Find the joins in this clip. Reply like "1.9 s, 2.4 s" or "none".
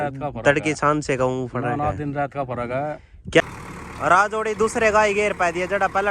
3.4 s